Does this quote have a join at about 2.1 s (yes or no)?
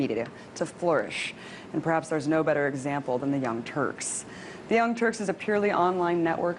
no